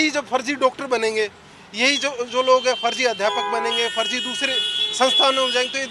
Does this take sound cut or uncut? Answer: uncut